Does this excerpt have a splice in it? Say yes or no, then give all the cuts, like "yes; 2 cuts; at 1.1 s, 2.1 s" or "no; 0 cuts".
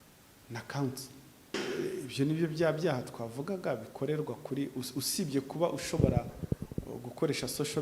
yes; 1 cut; at 1.5 s